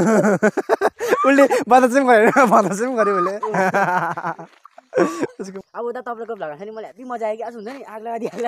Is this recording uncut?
no; 1 cut; at 5.5 s

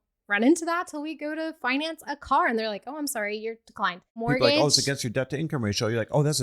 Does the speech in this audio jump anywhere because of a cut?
yes; 1 cut; at 4.2 s

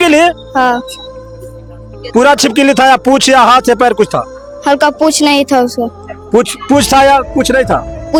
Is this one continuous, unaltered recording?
yes; 0 cuts

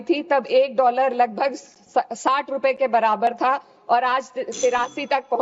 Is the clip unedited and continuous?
yes; 0 cuts

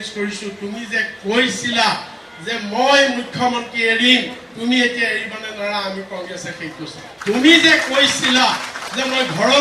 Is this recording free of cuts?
no; 1 cut; at 7.1 s

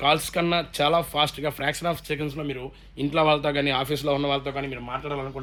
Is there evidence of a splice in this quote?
no; 0 cuts

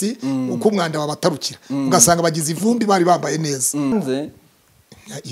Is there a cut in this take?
yes; 1 cut; at 3.9 s

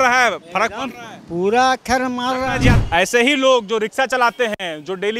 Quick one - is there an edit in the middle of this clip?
yes; 1 cut; at 2.7 s

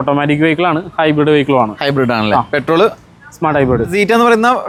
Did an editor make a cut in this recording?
no; 0 cuts

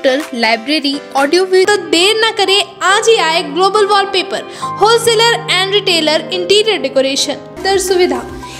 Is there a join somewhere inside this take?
yes; 2 cuts; at 1.7 s, 7.6 s

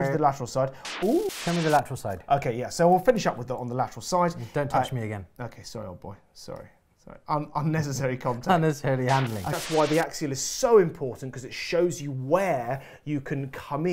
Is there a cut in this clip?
yes; 2 cuts; at 1.3 s, 9.6 s

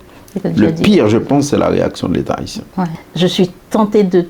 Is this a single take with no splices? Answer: no; 1 cut; at 3.0 s

